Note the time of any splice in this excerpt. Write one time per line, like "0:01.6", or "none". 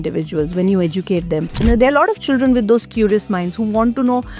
0:01.5